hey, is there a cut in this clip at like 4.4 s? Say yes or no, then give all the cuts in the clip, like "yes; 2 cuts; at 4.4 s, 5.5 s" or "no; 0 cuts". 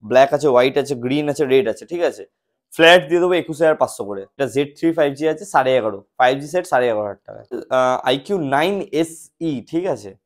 yes; 2 cuts; at 4.4 s, 7.6 s